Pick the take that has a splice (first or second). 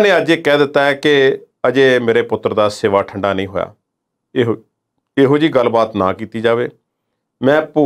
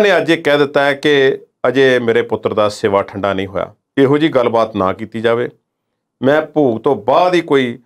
second